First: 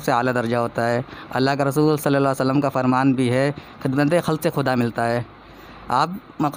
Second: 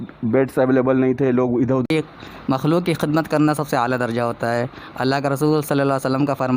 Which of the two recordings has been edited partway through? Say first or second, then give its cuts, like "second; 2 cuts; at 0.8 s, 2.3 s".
second; 1 cut; at 1.9 s